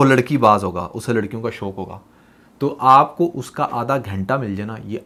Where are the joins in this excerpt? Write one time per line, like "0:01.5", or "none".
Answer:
none